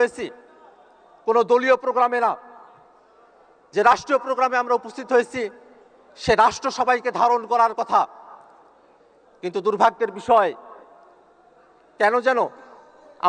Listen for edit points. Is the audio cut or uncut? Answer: uncut